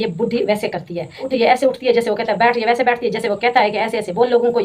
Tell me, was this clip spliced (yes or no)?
yes